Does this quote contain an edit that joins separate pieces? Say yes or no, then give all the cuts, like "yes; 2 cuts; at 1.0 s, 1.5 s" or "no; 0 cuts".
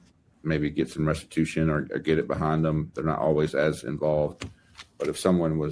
no; 0 cuts